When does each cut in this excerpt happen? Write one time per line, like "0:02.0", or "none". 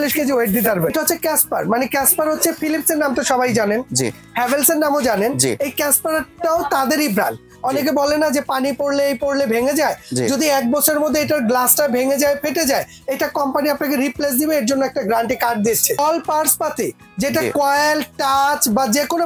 0:00.9
0:07.5
0:16.0